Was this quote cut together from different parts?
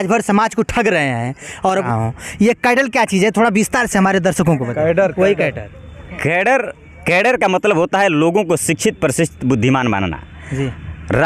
yes; 1 cut; at 1.7 s

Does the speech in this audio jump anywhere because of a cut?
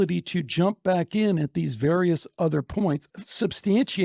yes; 1 cut; at 3.1 s

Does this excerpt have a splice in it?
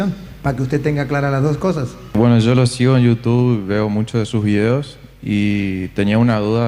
yes; 1 cut; at 2.2 s

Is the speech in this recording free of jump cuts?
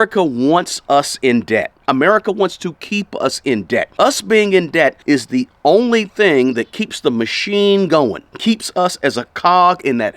no; 3 cuts; at 3.9 s, 5.0 s, 8.3 s

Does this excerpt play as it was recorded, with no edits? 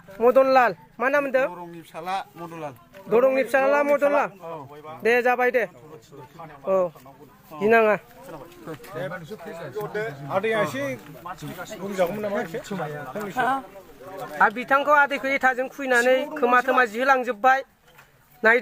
yes; 0 cuts

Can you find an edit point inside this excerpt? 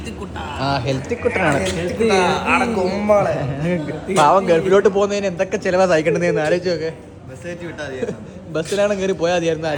no; 0 cuts

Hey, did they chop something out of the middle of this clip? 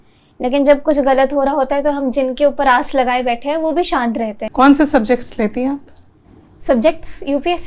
yes; 1 cut; at 4.4 s

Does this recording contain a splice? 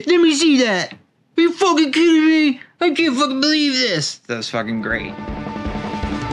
yes; 1 cut; at 5.1 s

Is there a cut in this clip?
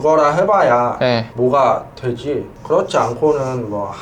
yes; 2 cuts; at 1.3 s, 2.5 s

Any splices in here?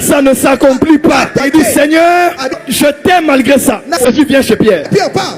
yes; 1 cut; at 4.1 s

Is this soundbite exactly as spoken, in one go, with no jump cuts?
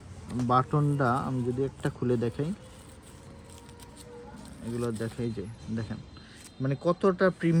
yes; 0 cuts

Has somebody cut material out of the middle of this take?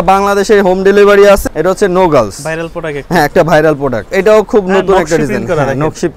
yes; 2 cuts; at 1.4 s, 4.0 s

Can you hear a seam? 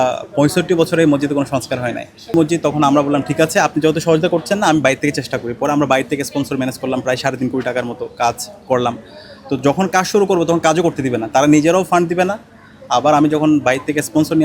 yes; 1 cut; at 2.3 s

